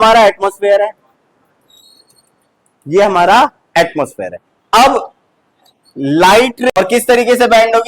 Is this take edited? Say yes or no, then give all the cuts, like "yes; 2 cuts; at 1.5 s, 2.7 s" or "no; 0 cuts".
yes; 1 cut; at 6.7 s